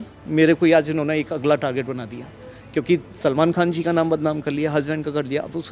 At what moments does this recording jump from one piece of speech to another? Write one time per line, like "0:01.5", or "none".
none